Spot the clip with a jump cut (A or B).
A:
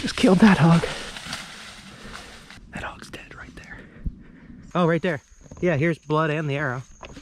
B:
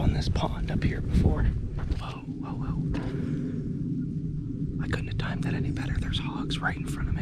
A